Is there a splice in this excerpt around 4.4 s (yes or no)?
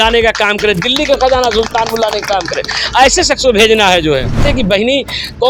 yes